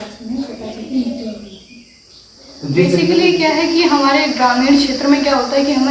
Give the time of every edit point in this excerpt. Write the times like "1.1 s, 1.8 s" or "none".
3.1 s